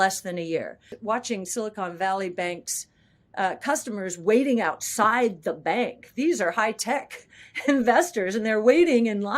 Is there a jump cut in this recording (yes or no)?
yes